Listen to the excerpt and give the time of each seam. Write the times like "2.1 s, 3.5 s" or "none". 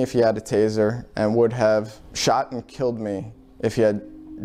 2.0 s